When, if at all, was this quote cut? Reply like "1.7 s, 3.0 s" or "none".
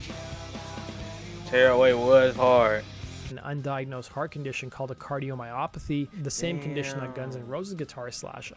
3.4 s